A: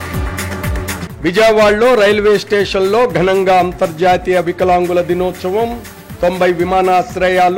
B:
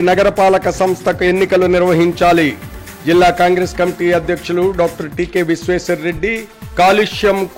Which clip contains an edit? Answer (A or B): A